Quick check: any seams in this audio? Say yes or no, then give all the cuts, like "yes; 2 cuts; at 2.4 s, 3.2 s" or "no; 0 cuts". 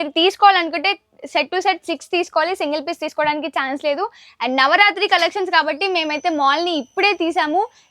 no; 0 cuts